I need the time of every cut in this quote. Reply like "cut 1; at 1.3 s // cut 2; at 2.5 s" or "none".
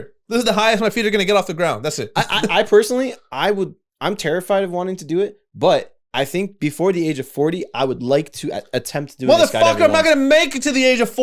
none